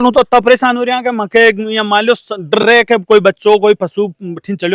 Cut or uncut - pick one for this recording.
uncut